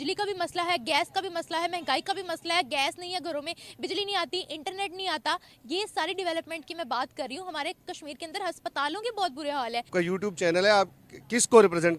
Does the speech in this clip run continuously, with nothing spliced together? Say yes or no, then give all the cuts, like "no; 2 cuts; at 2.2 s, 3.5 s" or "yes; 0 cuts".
no; 1 cut; at 9.9 s